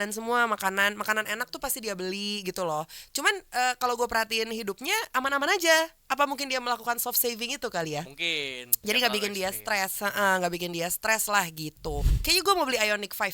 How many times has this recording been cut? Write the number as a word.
one